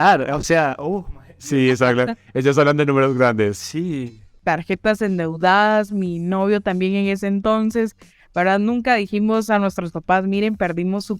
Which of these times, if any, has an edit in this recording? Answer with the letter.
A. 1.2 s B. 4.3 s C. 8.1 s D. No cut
B